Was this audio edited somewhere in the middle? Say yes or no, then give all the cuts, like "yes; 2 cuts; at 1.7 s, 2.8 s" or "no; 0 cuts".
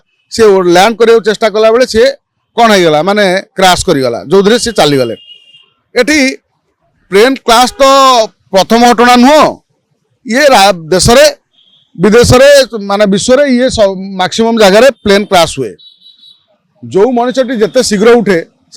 no; 0 cuts